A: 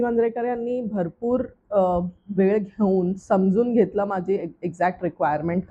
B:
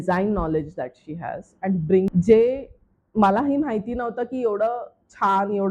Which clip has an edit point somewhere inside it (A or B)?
B